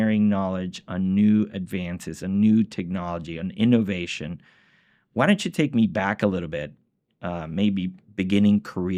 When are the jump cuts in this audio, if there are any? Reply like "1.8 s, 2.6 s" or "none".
none